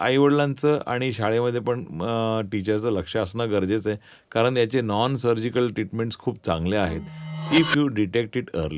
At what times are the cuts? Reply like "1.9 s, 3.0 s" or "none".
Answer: 4.2 s